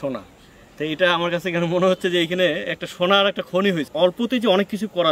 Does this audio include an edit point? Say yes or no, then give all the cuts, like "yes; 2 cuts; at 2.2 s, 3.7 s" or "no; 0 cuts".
yes; 1 cut; at 3.9 s